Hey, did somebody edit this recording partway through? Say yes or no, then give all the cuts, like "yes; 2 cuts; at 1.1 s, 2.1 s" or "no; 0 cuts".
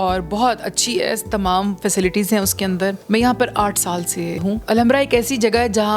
yes; 2 cuts; at 3.0 s, 4.5 s